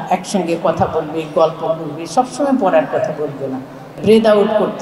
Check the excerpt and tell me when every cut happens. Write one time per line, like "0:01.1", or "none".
0:03.8